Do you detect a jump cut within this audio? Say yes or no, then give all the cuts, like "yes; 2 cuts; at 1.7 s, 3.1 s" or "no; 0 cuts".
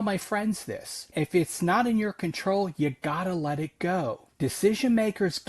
yes; 2 cuts; at 1.1 s, 4.3 s